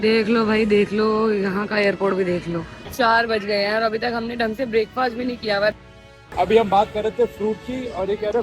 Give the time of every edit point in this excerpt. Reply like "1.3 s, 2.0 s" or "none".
2.8 s, 5.9 s